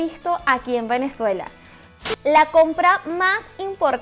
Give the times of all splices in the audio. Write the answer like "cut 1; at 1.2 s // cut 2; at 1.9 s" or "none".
cut 1; at 1.9 s